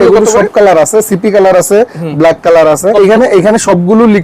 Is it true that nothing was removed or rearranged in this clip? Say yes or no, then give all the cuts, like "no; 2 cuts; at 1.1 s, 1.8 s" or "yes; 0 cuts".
no; 1 cut; at 2.9 s